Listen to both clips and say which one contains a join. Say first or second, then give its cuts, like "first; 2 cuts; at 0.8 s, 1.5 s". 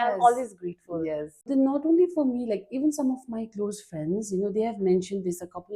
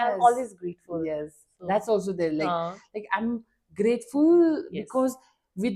first; 1 cut; at 1.4 s